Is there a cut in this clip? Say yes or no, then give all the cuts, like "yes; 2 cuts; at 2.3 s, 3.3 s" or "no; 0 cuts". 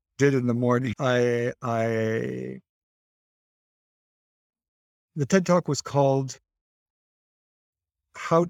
no; 0 cuts